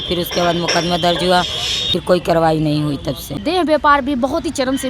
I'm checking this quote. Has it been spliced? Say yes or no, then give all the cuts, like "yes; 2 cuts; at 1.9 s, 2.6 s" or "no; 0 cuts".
yes; 1 cut; at 3.4 s